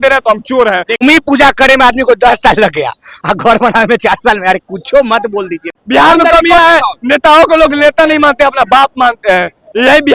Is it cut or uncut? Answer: cut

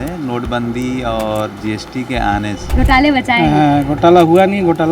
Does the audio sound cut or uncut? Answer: cut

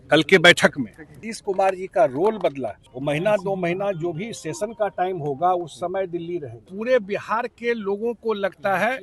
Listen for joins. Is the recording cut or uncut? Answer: cut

